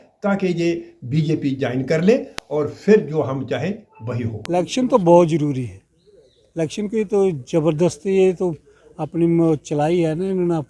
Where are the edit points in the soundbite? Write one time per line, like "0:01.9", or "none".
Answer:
0:04.4